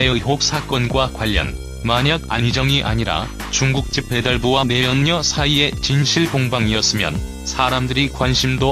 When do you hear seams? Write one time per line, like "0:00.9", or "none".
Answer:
0:03.5